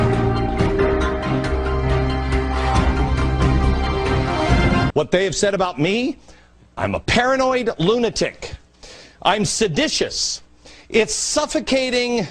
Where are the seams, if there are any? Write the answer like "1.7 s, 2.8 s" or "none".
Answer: 1.2 s

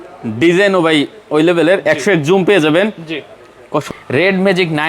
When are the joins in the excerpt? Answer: 3.8 s

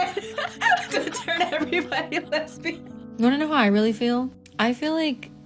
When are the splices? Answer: 3.1 s

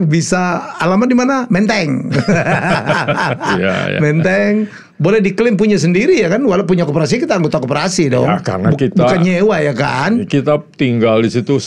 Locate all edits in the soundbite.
none

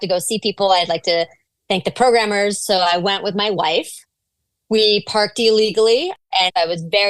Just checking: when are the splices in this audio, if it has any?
6.2 s

